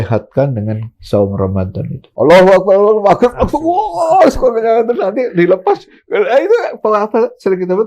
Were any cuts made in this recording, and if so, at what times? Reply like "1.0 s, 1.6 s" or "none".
2.0 s